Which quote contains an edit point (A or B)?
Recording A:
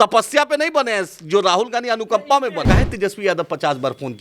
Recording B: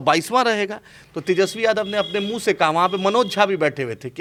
A